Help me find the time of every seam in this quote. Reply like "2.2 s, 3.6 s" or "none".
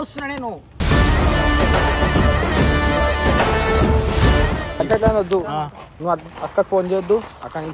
4.8 s

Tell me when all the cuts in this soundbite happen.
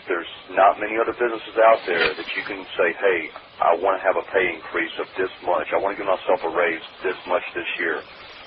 none

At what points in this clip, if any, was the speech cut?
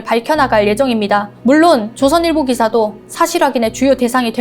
1.3 s

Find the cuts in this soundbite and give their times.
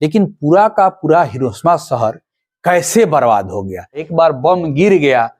4.0 s

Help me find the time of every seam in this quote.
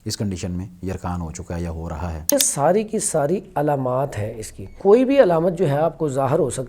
2.3 s, 4.6 s

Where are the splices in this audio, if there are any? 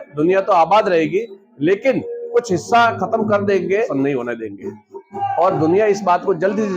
3.9 s, 5.2 s

